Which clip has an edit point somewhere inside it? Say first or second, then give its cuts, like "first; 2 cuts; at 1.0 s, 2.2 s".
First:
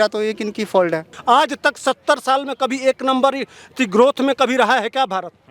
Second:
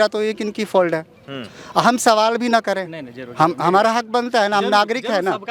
first; 1 cut; at 1.1 s